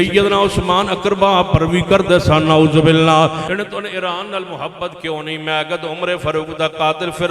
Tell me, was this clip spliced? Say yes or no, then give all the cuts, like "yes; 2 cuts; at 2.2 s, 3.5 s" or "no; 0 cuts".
yes; 1 cut; at 3.4 s